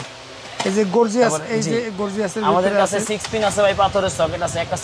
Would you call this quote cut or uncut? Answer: uncut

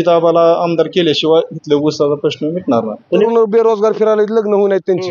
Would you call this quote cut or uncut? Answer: cut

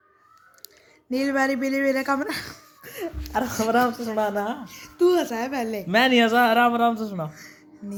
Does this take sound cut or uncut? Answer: uncut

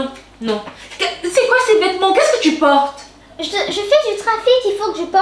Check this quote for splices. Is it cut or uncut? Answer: uncut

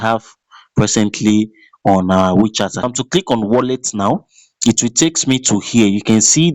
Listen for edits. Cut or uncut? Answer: cut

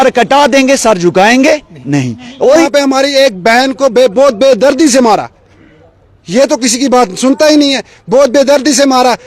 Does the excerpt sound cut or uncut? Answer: cut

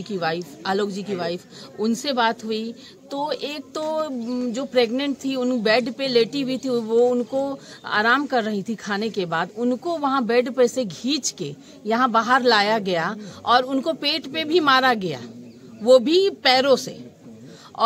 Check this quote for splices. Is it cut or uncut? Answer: uncut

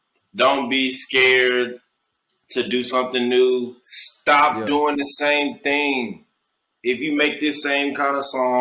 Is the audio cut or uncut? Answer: uncut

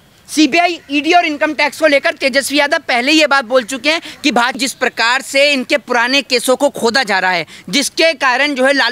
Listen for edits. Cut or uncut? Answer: cut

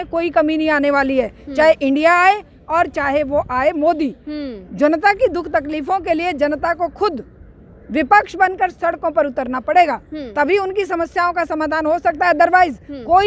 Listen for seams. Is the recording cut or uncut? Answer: uncut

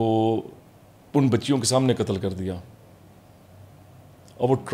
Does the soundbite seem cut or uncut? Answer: uncut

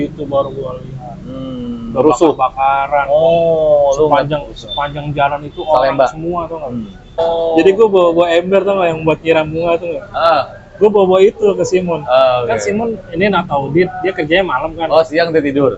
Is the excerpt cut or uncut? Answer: cut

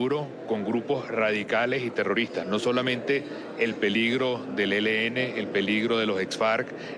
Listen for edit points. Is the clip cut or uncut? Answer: uncut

